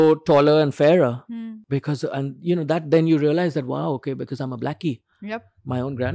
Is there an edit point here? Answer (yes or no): no